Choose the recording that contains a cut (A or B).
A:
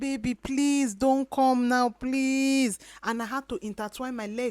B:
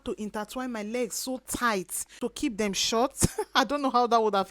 B